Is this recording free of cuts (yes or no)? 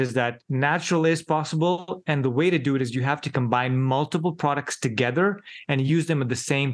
yes